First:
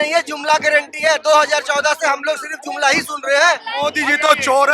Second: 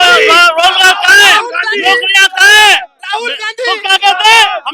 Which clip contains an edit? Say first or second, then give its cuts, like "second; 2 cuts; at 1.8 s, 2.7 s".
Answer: first; 1 cut; at 3.7 s